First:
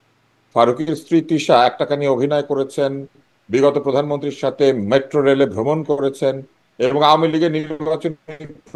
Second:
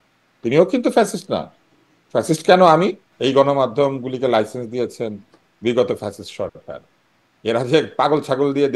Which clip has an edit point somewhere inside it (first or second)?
second